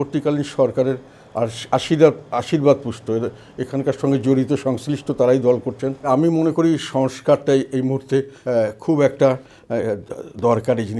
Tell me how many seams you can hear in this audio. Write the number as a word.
two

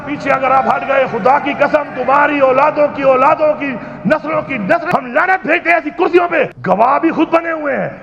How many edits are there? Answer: two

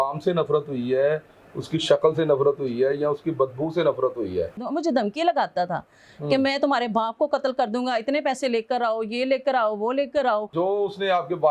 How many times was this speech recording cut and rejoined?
two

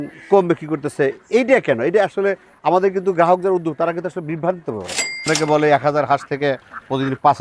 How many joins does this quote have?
one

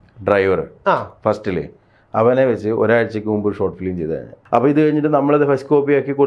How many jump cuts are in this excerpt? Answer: one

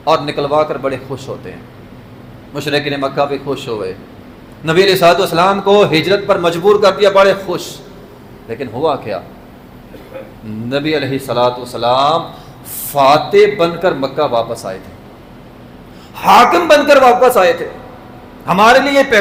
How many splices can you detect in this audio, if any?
zero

